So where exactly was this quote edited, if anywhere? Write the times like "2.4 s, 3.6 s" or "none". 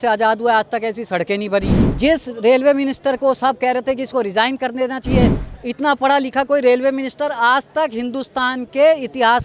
1.8 s